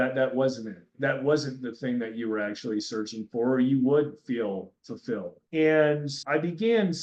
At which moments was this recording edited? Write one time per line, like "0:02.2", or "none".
none